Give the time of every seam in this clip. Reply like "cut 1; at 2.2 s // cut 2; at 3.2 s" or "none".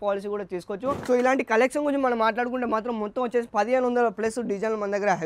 cut 1; at 1.0 s